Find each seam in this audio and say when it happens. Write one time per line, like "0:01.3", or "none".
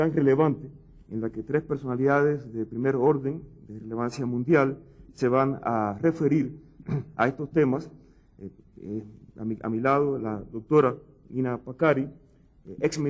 0:04.1